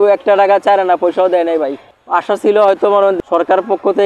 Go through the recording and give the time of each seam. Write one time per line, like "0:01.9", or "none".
0:03.2

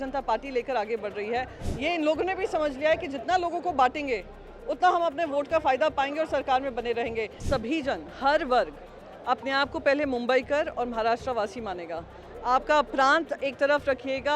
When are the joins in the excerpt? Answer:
0:01.6
0:07.4

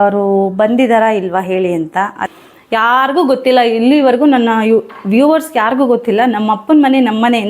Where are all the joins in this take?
0:02.3

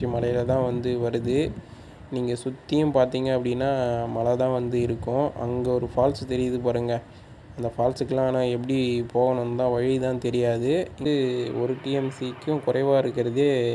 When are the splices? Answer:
0:11.1

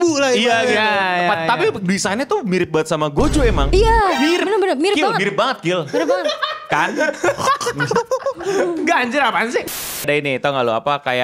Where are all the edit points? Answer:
0:03.6
0:09.7

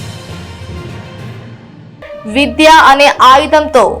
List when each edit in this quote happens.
0:01.6

